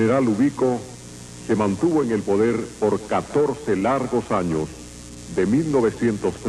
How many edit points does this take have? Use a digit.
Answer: 0